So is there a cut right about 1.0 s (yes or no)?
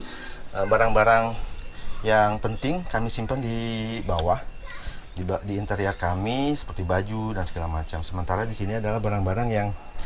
no